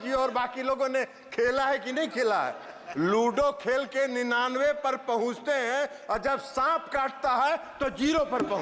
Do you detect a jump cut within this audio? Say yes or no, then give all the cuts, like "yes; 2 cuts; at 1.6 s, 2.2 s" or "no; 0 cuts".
no; 0 cuts